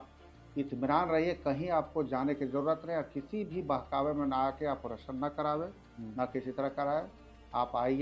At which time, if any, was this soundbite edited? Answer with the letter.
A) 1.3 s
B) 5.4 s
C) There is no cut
C